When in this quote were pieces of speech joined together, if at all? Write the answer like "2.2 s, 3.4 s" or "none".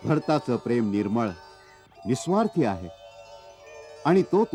none

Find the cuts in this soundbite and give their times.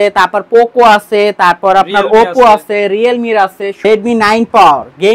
3.8 s

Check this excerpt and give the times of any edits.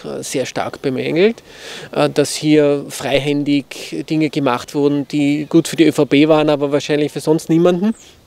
none

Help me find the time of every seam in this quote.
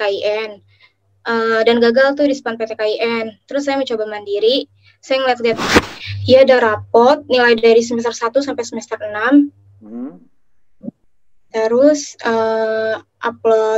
5.7 s

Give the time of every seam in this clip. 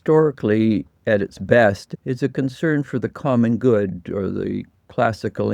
1.9 s

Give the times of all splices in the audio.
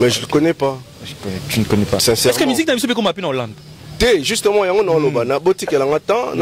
none

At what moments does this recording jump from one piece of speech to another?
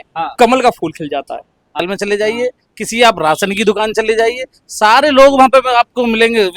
1.8 s

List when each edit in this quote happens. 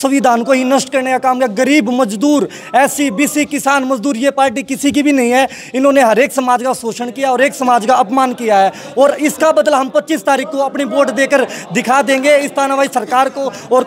none

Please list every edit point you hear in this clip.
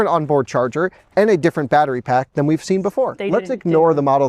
3.2 s

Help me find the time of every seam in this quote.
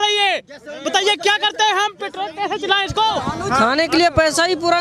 3.3 s

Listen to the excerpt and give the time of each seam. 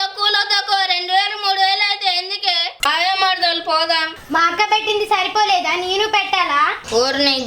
2.7 s

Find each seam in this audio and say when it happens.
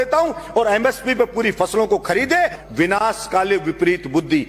2.6 s

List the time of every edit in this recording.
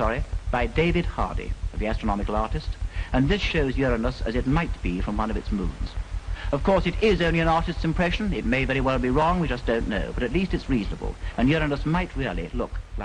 11.6 s

